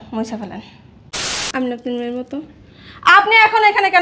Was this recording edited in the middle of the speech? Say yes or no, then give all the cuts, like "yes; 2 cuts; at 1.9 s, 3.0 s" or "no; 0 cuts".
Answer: yes; 1 cut; at 1.2 s